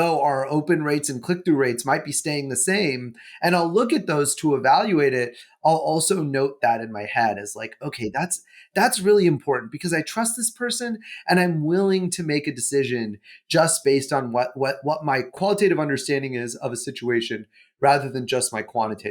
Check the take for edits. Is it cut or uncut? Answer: cut